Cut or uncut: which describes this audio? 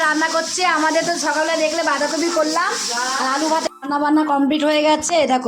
cut